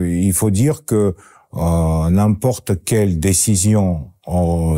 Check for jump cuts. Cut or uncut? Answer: uncut